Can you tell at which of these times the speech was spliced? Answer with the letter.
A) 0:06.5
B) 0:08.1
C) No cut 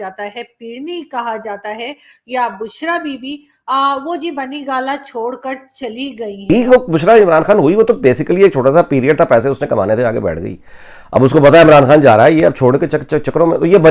A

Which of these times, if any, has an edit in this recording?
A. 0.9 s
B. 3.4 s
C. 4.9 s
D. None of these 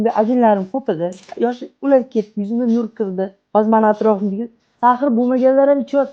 B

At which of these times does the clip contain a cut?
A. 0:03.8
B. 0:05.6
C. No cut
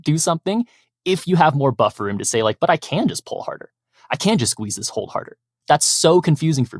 B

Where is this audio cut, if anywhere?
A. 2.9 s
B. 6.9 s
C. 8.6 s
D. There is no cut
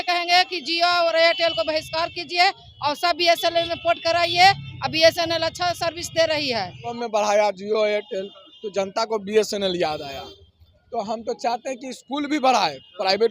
B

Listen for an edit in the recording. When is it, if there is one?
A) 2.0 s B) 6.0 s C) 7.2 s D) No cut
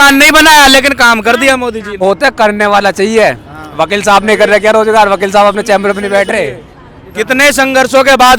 A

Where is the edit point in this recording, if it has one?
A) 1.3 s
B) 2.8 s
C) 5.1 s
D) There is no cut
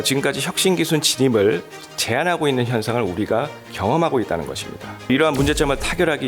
C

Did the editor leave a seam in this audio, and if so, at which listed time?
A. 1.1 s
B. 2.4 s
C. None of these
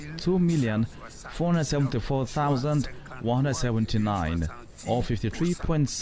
C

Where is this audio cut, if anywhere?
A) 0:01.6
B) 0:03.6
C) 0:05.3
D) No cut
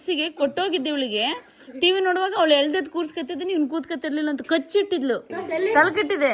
C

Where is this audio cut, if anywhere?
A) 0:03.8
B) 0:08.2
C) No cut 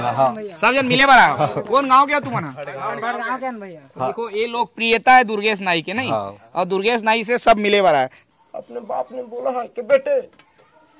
B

